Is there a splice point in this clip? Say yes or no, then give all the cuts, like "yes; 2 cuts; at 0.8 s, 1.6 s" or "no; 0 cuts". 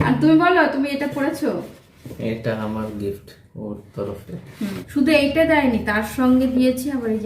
yes; 1 cut; at 4.8 s